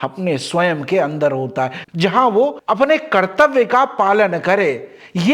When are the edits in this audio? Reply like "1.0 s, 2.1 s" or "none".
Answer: 1.8 s